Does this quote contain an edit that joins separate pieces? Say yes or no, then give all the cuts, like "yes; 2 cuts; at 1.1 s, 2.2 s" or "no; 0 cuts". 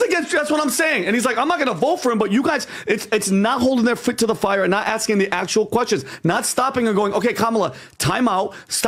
no; 0 cuts